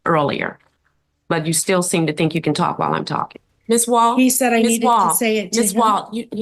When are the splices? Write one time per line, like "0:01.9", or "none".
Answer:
0:03.5